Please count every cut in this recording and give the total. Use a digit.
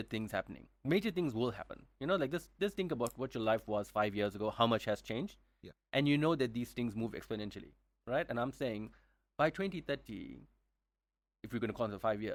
0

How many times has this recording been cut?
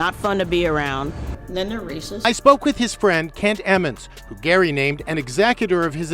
1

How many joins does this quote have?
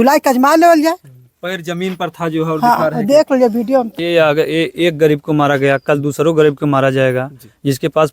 1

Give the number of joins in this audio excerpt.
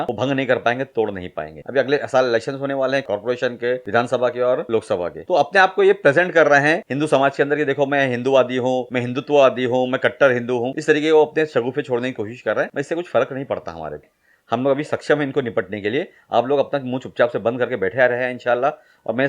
2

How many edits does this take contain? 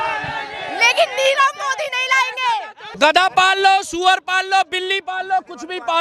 1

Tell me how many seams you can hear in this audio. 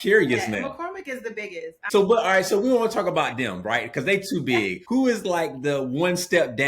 2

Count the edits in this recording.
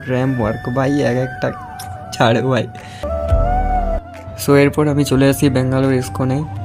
1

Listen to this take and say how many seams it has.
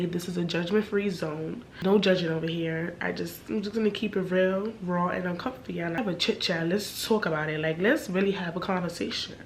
2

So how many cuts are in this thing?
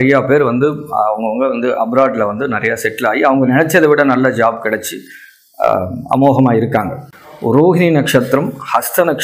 1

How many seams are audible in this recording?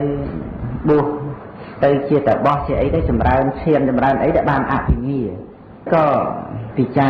1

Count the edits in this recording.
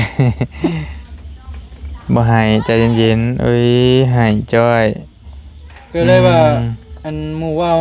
0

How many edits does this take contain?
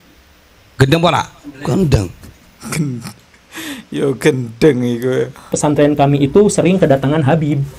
1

